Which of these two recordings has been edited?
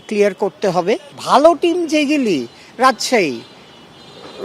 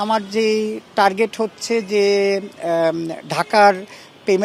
first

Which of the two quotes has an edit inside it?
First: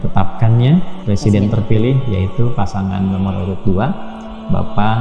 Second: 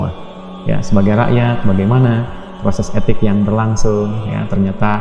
first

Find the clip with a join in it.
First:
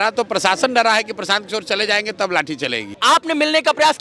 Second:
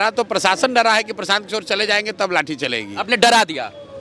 first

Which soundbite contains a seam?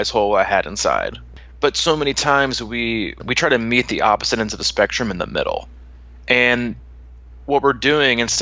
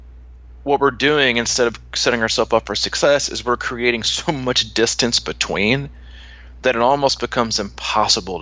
first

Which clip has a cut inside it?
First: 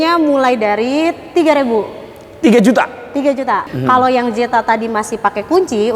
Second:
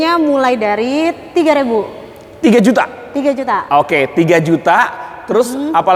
first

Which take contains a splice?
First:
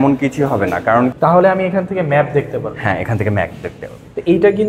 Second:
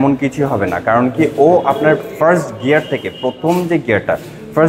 first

